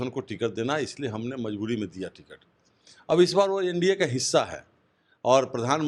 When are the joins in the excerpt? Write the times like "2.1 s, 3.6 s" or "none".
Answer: none